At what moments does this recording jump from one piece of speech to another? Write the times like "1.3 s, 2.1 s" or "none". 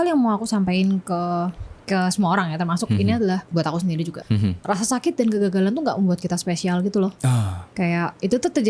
none